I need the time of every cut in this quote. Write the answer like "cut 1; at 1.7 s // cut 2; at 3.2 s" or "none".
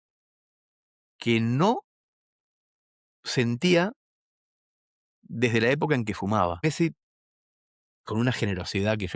cut 1; at 6.6 s